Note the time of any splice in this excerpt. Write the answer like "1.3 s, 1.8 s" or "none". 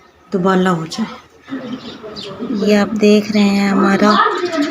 1.5 s